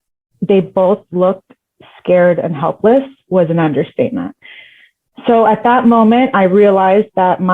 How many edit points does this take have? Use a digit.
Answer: 0